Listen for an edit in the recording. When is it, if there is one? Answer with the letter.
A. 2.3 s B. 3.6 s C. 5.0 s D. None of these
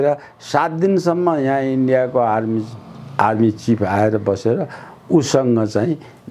D